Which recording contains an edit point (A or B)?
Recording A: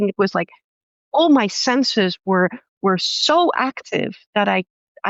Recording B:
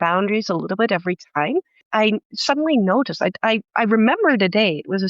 B